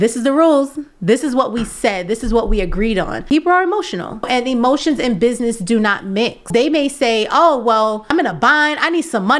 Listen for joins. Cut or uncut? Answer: cut